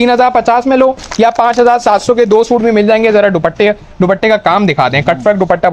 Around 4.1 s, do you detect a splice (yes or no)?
no